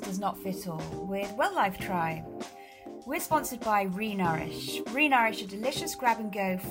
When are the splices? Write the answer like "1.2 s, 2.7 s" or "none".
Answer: none